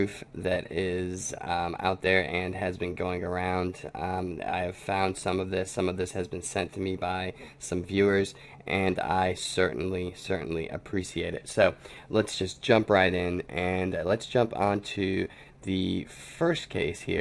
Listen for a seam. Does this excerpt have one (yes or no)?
yes